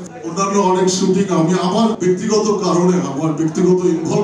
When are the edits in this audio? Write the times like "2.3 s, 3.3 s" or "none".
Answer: 2.0 s

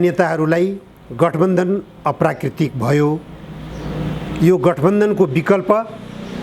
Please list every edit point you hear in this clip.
none

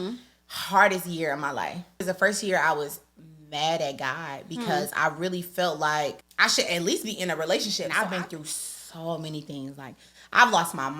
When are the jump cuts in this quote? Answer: 2.1 s, 6.3 s, 7.9 s

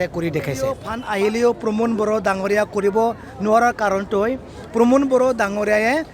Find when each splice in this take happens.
0.9 s

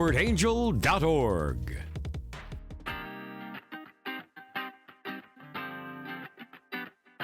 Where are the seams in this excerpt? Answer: 2.7 s

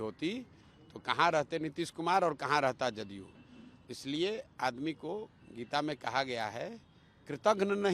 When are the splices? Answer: none

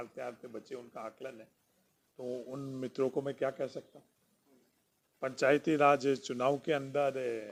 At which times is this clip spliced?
none

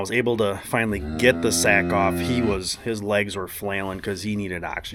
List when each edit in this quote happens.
none

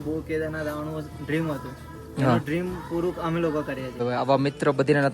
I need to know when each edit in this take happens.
4.0 s

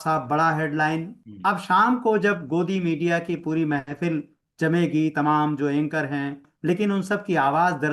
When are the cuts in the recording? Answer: 1.2 s, 6.5 s

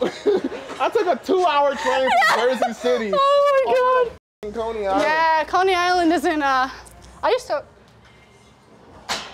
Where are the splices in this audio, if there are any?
none

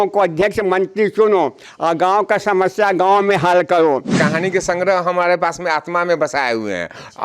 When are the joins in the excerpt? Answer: 4.1 s

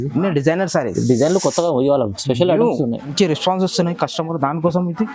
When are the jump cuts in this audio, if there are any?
3.1 s

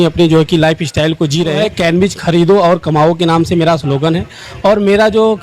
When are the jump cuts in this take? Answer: 1.7 s

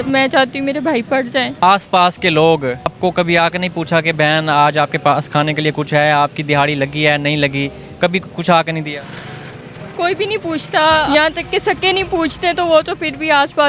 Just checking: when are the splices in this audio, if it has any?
1.6 s, 2.9 s, 11.1 s

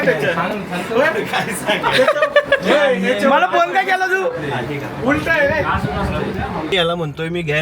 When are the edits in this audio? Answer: 6.7 s

